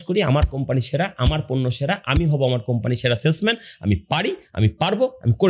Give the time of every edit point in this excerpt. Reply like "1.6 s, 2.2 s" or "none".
none